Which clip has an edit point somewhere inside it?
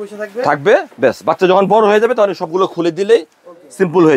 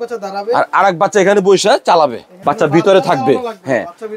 second; 1 cut; at 2.3 s

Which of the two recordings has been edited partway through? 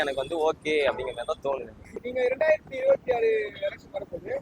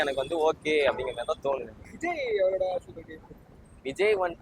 first; 1 cut; at 2.0 s

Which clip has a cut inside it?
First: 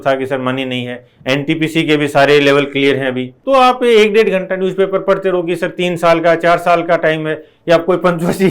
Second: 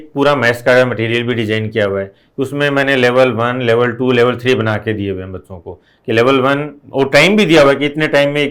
first; 1 cut; at 3.4 s

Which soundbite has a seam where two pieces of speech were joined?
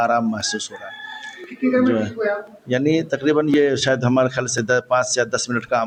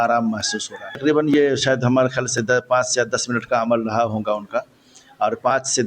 second; 1 cut; at 0.9 s

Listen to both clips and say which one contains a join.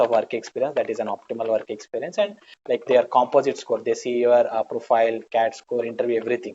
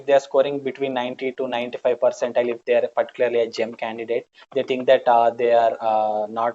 first; 1 cut; at 2.5 s

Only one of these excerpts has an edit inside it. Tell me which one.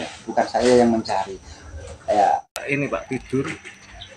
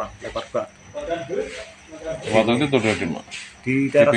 first; 1 cut; at 2.6 s

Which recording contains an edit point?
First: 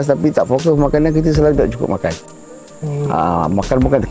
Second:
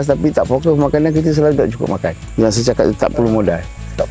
second; 1 cut; at 2.2 s

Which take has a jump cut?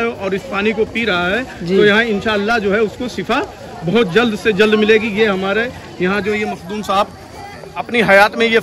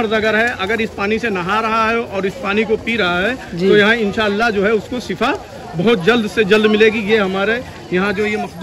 first; 1 cut; at 7.7 s

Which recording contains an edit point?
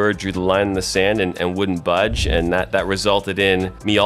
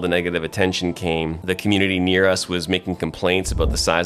second; 1 cut; at 1.4 s

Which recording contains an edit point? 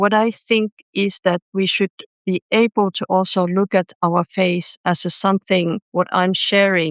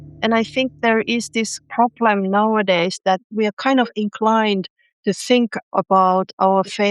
second; 2 cuts; at 1.6 s, 3.3 s

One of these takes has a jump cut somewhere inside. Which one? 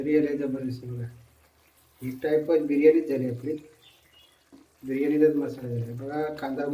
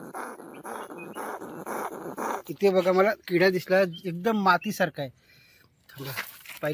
second; 1 cut; at 2.5 s

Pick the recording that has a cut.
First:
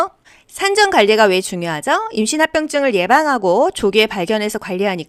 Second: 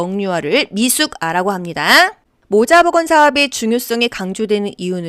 second; 1 cut; at 2.3 s

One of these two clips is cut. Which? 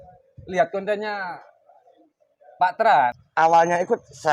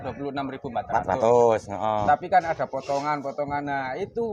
first; 1 cut; at 3.2 s

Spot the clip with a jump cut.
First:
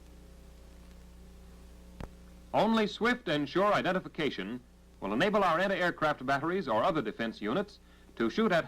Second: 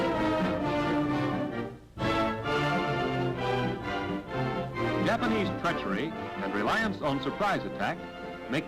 first; 1 cut; at 2.5 s

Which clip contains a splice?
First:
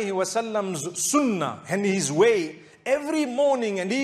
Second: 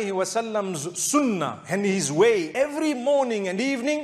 second; 1 cut; at 2.5 s

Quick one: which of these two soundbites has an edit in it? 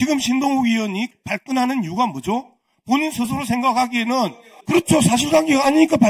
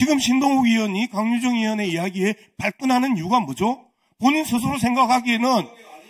first; 2 cuts; at 1.1 s, 4.5 s

